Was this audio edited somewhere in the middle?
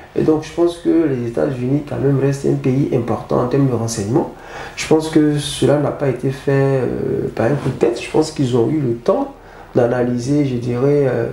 no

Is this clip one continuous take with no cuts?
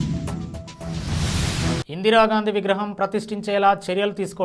no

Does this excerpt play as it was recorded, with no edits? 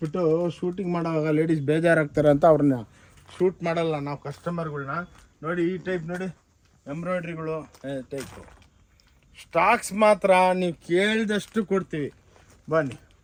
yes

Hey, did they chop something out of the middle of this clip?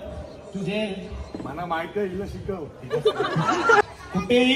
yes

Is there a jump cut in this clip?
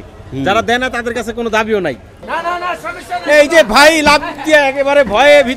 yes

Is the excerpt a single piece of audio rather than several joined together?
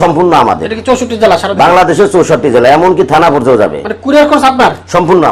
yes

